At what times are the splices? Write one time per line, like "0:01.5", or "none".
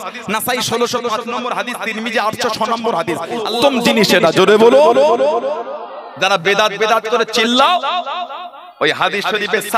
0:03.5